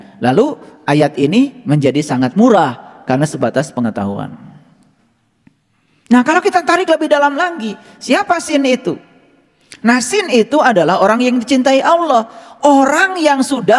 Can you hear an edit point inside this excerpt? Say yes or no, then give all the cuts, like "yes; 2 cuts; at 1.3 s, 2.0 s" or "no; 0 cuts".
no; 0 cuts